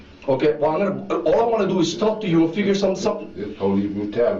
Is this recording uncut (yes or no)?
yes